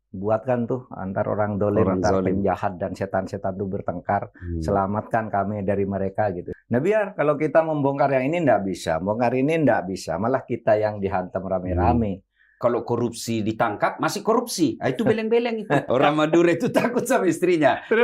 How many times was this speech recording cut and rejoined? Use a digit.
3